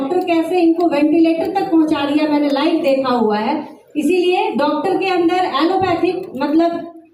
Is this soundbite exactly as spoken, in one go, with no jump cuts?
yes; 0 cuts

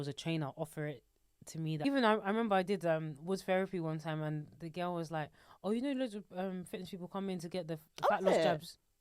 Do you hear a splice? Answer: yes; 1 cut; at 1.8 s

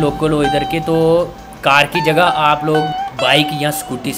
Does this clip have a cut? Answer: yes; 1 cut; at 3.2 s

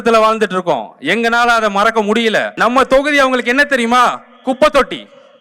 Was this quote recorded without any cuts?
no; 1 cut; at 2.5 s

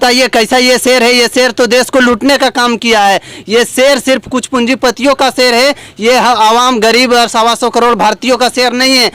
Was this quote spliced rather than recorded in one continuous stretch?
no; 0 cuts

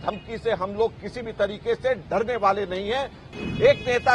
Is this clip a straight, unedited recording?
no; 1 cut; at 3.2 s

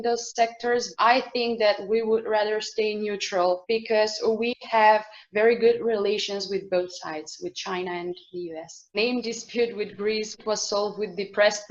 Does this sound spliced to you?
yes; 3 cuts; at 1.0 s, 3.6 s, 8.8 s

